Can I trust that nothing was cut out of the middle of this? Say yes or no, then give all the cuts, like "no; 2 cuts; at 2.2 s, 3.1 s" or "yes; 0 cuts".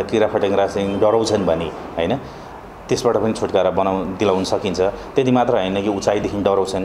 yes; 0 cuts